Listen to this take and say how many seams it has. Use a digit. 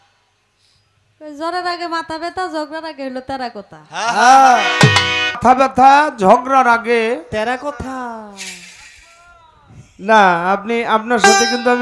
1